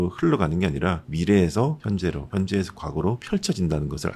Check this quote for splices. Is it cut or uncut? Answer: cut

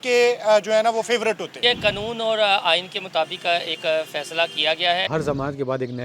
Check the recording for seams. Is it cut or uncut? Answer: cut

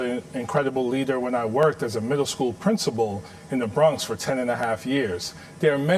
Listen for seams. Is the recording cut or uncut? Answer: uncut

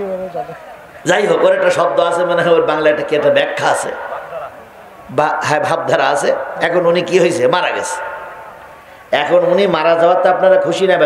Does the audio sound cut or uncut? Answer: uncut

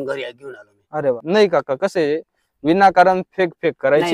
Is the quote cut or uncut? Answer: cut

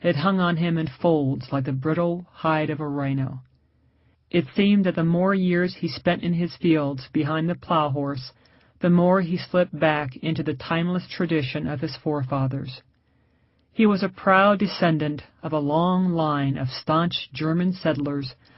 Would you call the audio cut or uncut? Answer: uncut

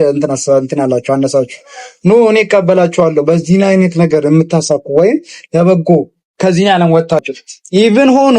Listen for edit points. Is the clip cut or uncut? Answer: cut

